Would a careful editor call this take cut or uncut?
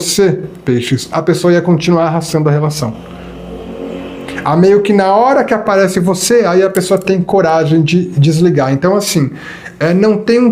uncut